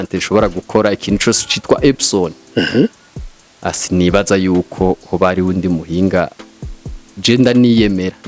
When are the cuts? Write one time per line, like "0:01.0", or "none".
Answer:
none